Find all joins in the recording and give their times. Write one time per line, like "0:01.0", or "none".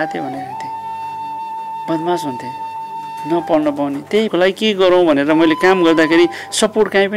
0:04.3